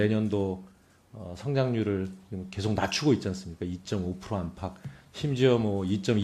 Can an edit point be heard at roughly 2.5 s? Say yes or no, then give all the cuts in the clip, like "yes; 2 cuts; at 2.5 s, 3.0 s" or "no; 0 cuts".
yes; 1 cut; at 2.5 s